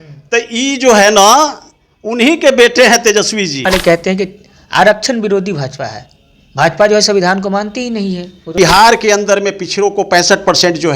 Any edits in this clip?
yes; 2 cuts; at 3.6 s, 8.5 s

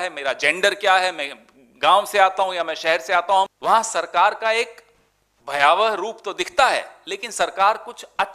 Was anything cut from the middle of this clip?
yes; 1 cut; at 3.5 s

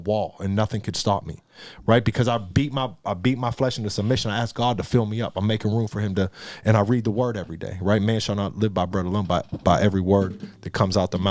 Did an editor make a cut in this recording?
no; 0 cuts

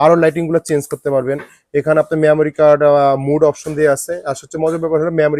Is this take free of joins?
yes; 0 cuts

